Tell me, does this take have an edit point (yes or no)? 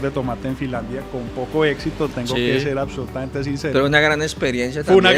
no